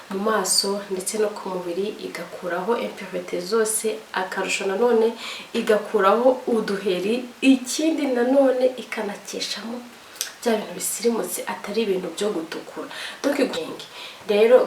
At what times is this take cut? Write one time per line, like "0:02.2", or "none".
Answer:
0:13.5